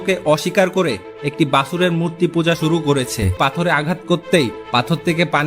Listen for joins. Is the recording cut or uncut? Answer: cut